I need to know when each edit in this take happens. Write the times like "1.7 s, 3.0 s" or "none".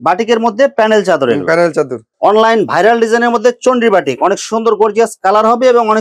2.0 s